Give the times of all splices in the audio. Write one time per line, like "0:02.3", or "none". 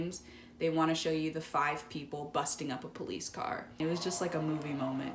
0:03.8